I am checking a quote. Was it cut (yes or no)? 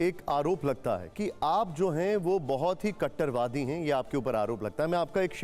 yes